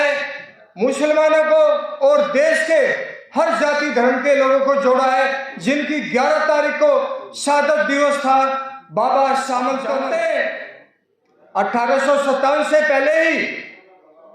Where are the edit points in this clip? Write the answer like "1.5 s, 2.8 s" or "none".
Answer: 10.0 s